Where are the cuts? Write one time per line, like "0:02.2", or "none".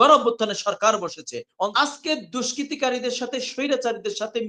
0:01.7